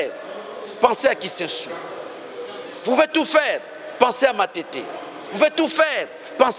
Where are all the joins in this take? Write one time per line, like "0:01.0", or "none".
none